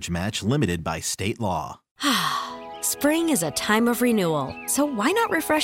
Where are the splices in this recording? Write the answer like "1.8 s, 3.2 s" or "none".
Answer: 1.9 s